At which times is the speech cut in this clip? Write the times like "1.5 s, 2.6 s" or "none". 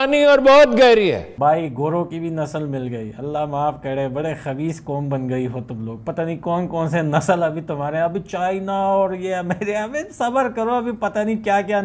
1.3 s